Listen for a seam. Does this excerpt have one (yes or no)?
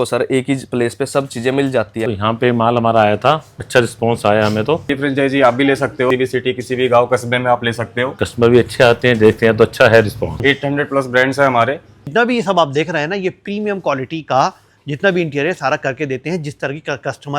yes